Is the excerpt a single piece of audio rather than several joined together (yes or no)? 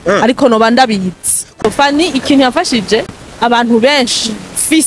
no